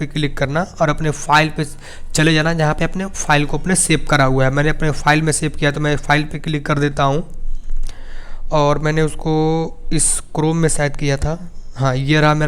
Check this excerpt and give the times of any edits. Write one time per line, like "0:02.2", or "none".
none